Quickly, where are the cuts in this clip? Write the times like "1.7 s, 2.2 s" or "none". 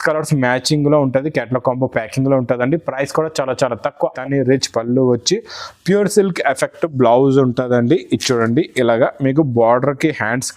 4.1 s